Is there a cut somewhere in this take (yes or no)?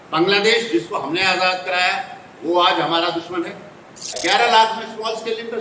yes